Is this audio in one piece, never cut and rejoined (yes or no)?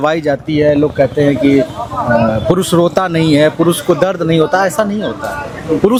yes